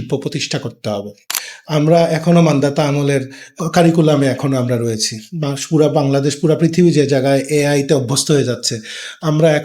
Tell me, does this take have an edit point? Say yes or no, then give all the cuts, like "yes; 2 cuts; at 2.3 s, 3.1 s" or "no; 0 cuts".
yes; 2 cuts; at 1.2 s, 3.5 s